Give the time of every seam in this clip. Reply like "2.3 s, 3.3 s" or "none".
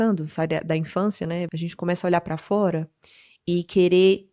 1.5 s